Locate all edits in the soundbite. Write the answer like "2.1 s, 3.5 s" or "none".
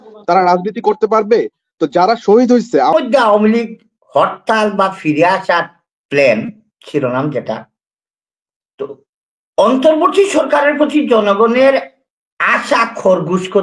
2.9 s